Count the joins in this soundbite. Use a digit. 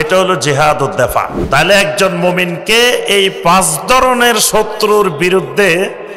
1